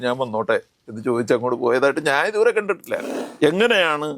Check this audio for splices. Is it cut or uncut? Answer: cut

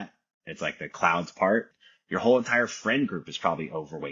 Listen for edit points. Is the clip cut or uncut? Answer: cut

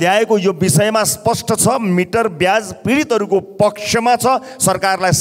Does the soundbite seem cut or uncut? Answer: uncut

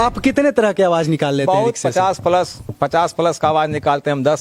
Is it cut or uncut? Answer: uncut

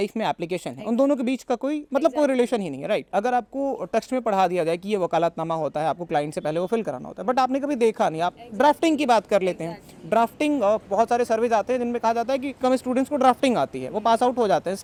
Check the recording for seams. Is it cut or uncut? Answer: uncut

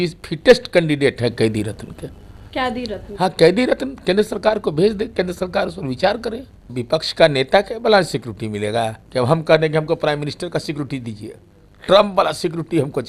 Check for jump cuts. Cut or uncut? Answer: cut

